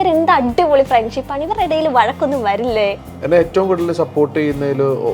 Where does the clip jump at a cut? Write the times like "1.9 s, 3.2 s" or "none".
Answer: 3.1 s